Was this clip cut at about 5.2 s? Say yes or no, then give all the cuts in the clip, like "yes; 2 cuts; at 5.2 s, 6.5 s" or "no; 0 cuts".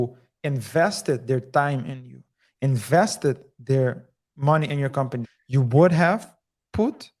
yes; 1 cut; at 5.2 s